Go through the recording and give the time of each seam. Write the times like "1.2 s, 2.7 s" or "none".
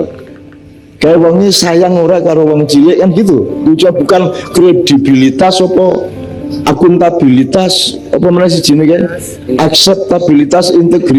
none

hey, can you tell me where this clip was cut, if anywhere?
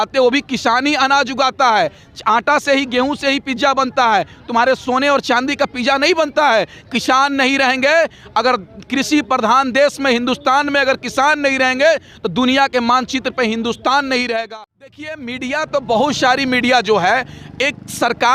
14.5 s

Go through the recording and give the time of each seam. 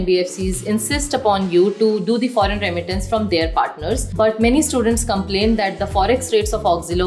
4.1 s

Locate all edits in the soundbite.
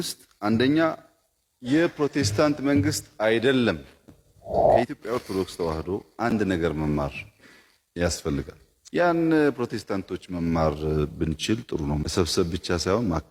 none

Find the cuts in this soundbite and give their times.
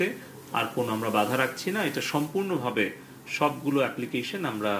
none

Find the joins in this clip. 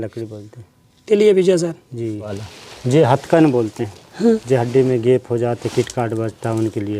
2.4 s

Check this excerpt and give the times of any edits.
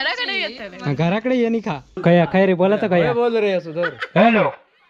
1.9 s

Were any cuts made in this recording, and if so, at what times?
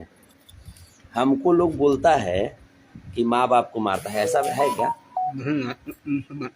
none

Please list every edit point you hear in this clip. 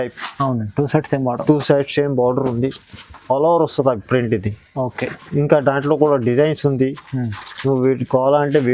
none

